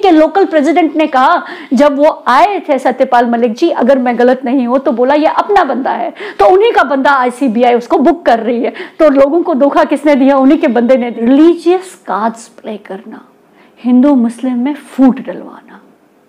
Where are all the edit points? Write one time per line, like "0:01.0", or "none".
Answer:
0:11.1